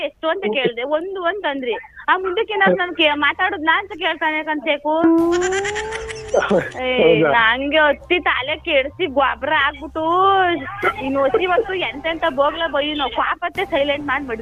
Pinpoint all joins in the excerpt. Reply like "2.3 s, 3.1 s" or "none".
none